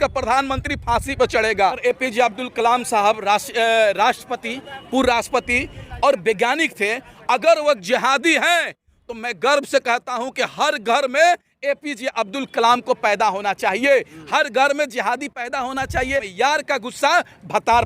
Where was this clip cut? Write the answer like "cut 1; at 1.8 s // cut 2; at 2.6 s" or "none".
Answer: cut 1; at 1.8 s // cut 2; at 16.3 s

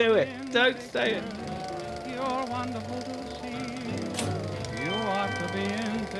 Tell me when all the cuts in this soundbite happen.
cut 1; at 1.6 s

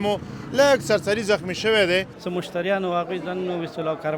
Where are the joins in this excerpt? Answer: cut 1; at 2.2 s

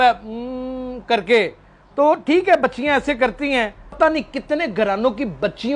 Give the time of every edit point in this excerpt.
cut 1; at 4.0 s

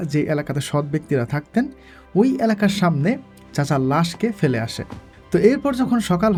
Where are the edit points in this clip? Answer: none

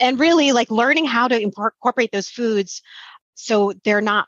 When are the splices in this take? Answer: none

